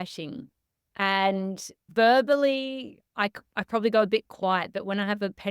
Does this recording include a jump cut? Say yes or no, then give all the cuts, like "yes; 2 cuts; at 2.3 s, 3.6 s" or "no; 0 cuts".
yes; 1 cut; at 1.8 s